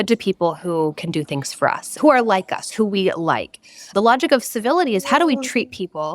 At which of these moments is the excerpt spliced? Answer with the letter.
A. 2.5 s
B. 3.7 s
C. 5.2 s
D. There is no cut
B